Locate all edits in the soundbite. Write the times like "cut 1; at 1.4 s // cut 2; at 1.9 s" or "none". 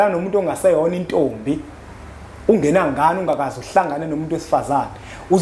none